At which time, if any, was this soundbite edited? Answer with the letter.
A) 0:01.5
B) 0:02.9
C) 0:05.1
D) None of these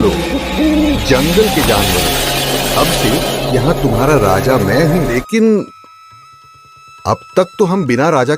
C